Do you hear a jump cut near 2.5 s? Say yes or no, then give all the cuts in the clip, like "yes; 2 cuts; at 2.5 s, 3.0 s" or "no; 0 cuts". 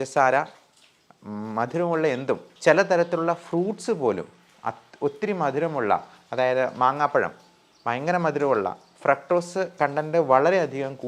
yes; 1 cut; at 2.5 s